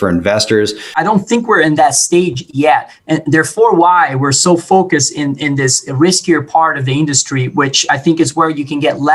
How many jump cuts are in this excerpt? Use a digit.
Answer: 1